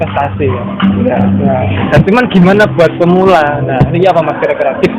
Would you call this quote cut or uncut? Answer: uncut